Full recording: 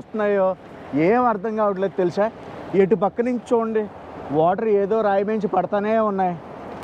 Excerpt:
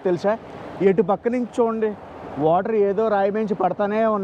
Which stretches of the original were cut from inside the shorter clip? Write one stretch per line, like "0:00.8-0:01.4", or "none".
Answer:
none